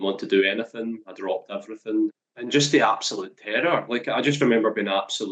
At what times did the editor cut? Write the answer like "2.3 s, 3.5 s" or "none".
2.2 s